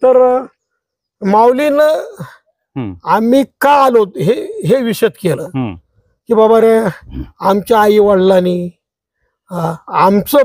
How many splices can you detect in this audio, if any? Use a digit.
0